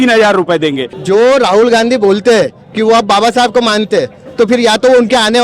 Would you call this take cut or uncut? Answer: cut